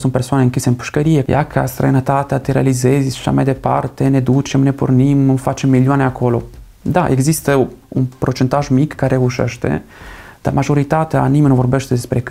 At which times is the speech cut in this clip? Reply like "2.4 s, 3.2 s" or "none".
1.2 s